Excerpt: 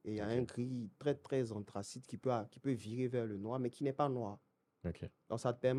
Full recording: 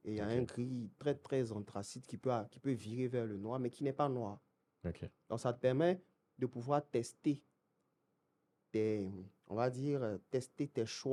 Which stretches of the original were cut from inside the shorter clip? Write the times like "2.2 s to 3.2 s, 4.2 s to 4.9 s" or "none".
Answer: none